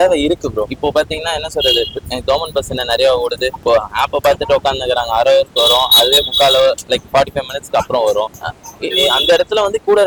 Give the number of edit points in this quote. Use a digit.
0